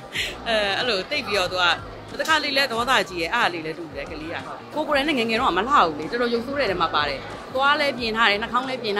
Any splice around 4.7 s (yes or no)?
yes